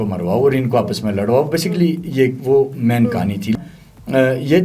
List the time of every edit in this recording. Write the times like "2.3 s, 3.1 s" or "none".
3.5 s